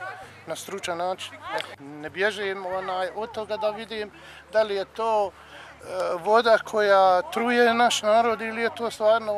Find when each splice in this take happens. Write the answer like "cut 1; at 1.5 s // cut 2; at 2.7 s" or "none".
cut 1; at 1.8 s